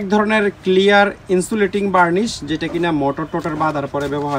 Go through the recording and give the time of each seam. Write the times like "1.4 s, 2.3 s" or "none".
none